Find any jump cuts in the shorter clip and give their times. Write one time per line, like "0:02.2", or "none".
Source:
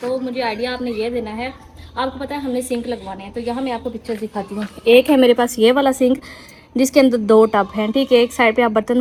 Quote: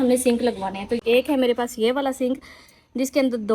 0:01.0